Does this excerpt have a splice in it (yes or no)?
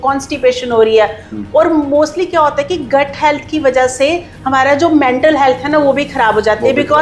no